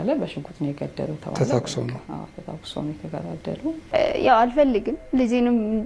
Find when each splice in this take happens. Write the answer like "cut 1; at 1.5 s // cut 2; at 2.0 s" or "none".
cut 1; at 3.8 s